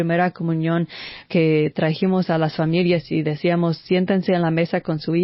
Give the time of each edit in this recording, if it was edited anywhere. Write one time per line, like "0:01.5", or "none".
0:01.2